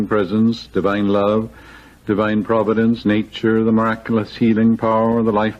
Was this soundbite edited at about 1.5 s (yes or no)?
no